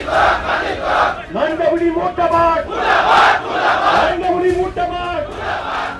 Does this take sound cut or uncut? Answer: uncut